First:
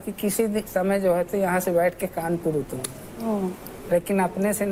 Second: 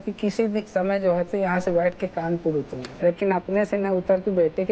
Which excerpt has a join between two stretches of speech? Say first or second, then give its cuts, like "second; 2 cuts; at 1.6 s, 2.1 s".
second; 1 cut; at 2.8 s